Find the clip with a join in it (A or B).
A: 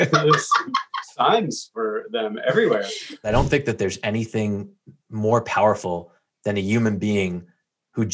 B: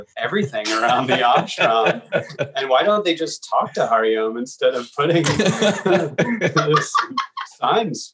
A